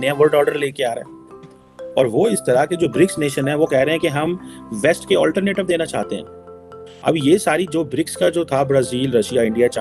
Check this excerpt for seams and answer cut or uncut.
uncut